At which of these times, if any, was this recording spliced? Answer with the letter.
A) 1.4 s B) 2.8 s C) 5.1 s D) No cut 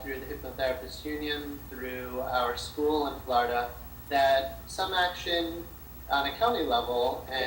B